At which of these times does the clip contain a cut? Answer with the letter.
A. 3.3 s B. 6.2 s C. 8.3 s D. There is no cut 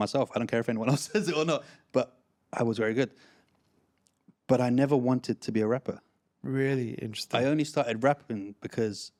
D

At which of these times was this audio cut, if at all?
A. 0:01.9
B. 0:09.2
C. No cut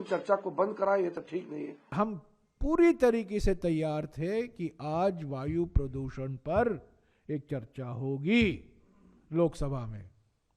A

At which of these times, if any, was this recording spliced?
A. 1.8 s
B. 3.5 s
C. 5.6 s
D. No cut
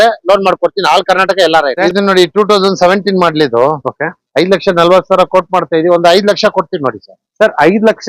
A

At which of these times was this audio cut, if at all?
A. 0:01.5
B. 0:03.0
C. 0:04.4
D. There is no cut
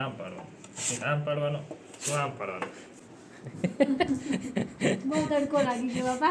B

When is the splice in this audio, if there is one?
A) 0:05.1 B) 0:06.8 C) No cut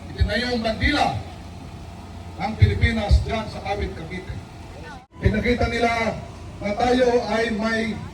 A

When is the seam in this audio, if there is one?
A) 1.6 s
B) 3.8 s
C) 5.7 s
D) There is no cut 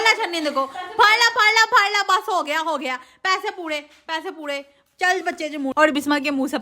C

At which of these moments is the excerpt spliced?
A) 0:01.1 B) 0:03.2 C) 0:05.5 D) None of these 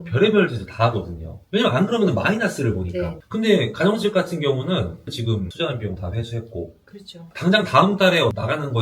B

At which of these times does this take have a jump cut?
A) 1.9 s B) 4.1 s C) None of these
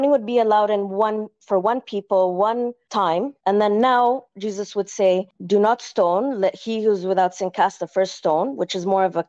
C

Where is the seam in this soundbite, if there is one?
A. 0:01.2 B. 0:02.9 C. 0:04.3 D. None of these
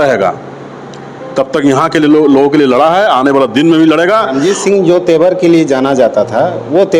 C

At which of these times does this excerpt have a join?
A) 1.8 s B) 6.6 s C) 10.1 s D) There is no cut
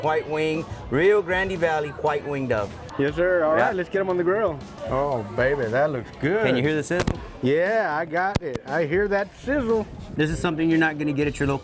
C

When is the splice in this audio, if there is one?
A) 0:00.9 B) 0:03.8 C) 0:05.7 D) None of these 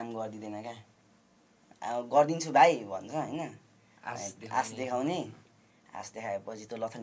D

